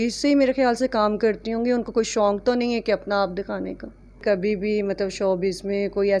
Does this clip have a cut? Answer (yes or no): yes